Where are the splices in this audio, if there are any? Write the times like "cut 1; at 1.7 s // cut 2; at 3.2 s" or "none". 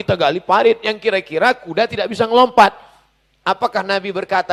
none